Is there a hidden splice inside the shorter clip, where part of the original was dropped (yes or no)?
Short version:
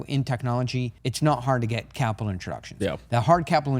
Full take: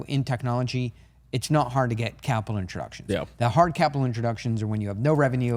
yes